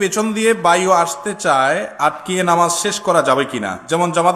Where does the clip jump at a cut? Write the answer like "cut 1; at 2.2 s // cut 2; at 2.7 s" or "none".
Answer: cut 1; at 1.9 s